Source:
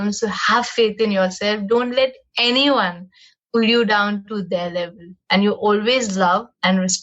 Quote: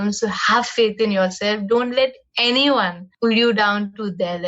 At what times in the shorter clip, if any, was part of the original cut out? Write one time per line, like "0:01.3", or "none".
0:03.0